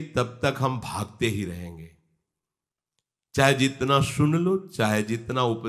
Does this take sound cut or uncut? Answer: uncut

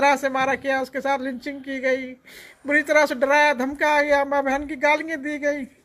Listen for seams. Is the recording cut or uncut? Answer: uncut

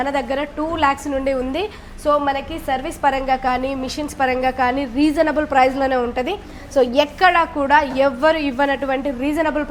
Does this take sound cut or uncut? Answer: uncut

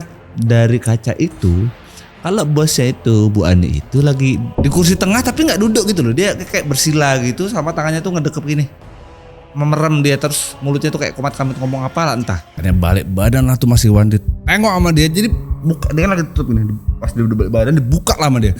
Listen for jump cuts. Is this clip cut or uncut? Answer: cut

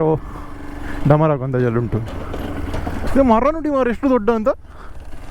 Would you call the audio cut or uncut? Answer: cut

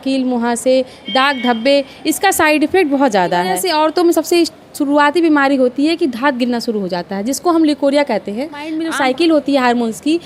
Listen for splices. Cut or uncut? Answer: cut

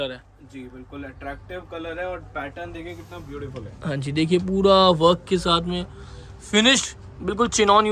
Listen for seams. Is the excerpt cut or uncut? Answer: uncut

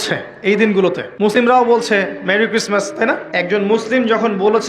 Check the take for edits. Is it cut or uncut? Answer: cut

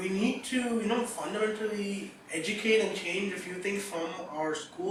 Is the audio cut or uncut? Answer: uncut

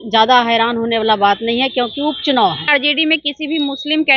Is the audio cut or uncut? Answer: cut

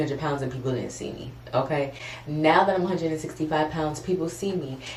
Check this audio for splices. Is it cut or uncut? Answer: uncut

